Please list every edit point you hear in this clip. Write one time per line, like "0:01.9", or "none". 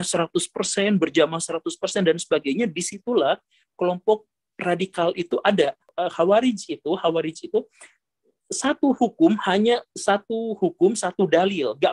0:05.9